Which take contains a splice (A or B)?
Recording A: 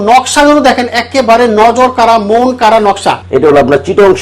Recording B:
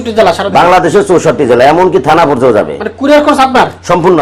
A